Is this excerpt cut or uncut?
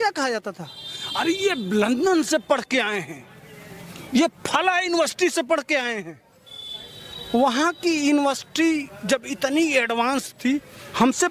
uncut